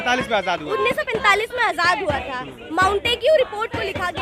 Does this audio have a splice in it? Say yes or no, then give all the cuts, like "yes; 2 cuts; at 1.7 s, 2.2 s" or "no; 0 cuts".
no; 0 cuts